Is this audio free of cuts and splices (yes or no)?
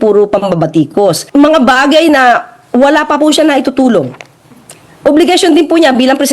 no